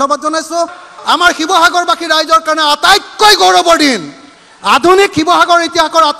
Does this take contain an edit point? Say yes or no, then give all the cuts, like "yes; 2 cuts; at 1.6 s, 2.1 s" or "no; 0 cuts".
no; 0 cuts